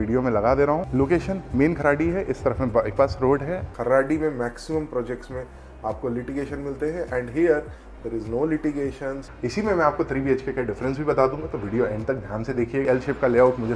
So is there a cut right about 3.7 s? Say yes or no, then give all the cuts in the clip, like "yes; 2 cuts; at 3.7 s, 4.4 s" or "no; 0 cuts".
yes; 4 cuts; at 0.8 s, 3.7 s, 9.2 s, 12.8 s